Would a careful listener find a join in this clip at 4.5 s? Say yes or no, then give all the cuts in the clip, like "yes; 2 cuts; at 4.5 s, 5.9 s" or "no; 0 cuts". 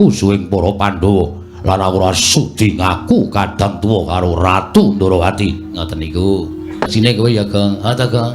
no; 1 cut; at 6.9 s